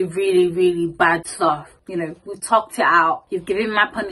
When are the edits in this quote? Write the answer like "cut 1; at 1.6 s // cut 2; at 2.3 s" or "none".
cut 1; at 1.7 s // cut 2; at 3.2 s